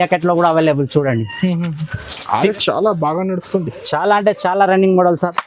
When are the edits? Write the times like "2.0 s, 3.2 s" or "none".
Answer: 2.5 s